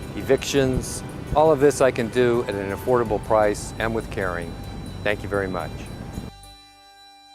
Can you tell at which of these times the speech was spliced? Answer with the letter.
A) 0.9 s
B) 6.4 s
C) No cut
B